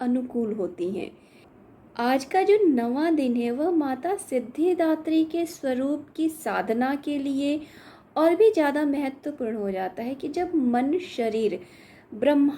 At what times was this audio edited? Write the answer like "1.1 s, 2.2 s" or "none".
1.5 s